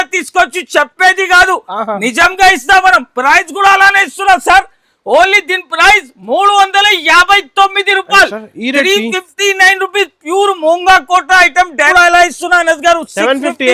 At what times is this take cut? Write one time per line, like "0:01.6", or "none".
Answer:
0:11.9